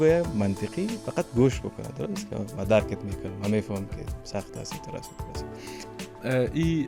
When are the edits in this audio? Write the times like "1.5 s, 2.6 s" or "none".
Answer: none